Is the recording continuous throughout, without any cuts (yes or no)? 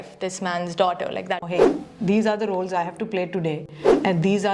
no